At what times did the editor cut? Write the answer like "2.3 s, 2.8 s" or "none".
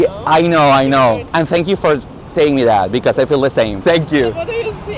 1.2 s, 3.8 s